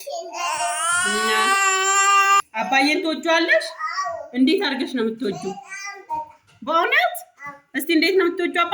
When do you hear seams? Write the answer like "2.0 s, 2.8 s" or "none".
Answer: 2.4 s